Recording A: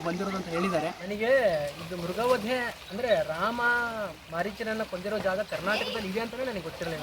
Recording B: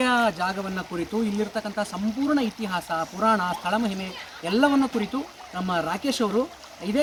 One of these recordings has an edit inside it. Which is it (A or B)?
A